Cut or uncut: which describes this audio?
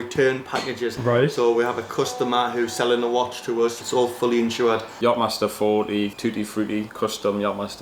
cut